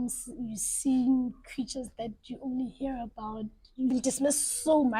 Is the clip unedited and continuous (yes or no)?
no